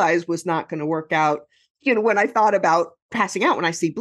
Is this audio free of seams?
no; 2 cuts; at 1.8 s, 3.0 s

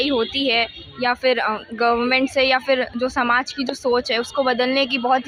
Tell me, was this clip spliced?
no; 0 cuts

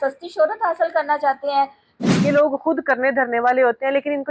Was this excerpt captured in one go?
no; 1 cut; at 2.1 s

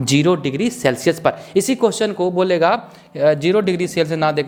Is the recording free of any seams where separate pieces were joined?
yes; 0 cuts

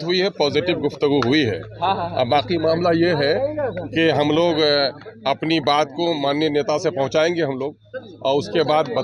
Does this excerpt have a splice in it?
no; 0 cuts

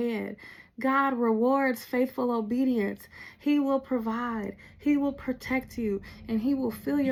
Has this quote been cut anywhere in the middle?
no; 0 cuts

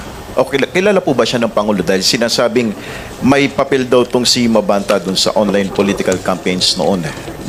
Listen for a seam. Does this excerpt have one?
no; 0 cuts

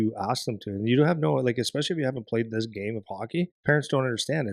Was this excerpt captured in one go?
no; 1 cut; at 3.5 s

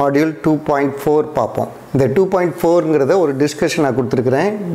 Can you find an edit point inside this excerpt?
yes; 1 cut; at 1.8 s

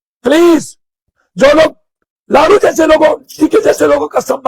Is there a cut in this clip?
no; 0 cuts

